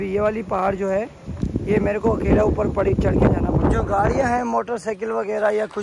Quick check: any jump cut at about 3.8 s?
no; 0 cuts

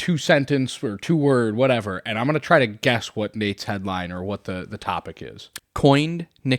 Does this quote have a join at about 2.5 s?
no; 1 cut; at 5.4 s

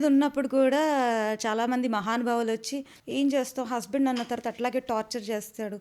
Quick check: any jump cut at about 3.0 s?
yes; 1 cut; at 3.0 s

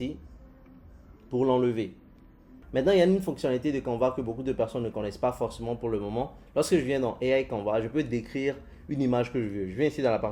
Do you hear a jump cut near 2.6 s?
yes; 1 cut; at 2.6 s

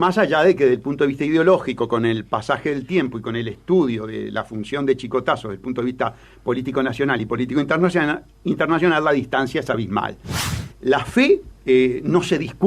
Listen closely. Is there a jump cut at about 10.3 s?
yes; 1 cut; at 10.3 s

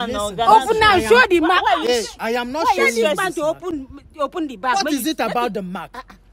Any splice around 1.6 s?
no; 0 cuts

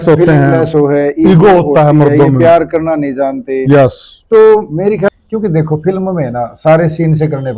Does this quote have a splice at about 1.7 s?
no; 1 cut; at 5.1 s

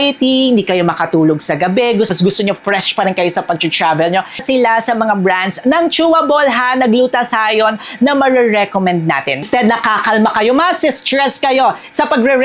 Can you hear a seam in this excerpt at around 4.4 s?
yes; 3 cuts; at 2.1 s, 4.4 s, 9.5 s

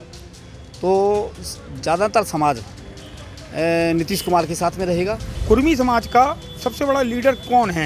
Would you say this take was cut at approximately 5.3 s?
yes; 1 cut; at 5.3 s

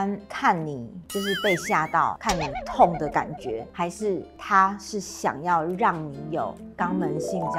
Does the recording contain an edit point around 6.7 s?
yes; 2 cuts; at 3.7 s, 6.7 s

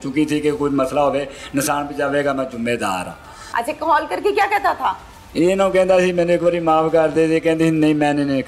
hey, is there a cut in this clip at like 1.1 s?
no; 1 cut; at 3.3 s

